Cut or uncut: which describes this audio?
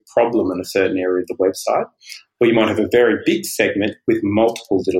uncut